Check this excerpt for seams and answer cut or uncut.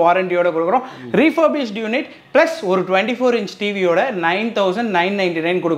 uncut